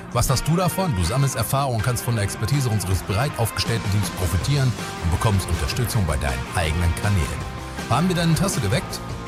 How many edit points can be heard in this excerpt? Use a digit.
0